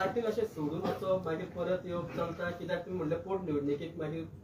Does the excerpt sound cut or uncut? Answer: uncut